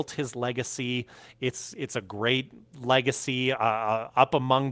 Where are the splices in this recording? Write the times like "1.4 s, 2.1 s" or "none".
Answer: none

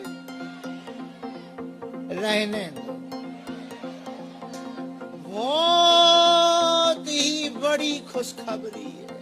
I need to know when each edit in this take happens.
5.4 s

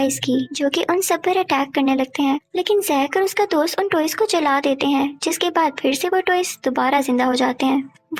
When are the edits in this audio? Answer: none

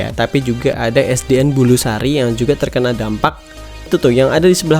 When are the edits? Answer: 3.9 s

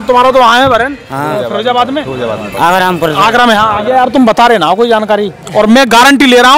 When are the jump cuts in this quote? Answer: 3.9 s

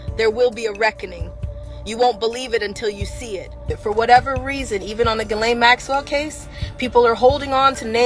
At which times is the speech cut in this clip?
3.7 s

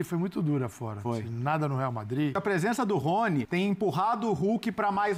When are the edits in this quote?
2.4 s, 3.5 s

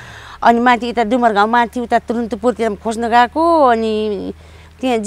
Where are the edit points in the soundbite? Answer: none

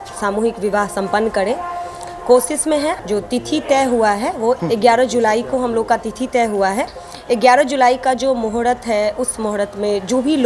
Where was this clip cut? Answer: 3.0 s, 4.6 s

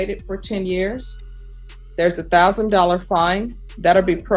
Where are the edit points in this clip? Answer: none

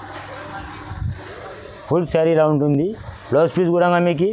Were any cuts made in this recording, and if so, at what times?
none

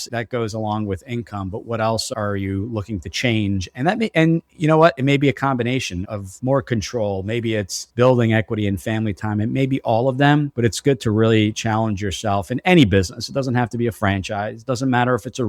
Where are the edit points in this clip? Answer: none

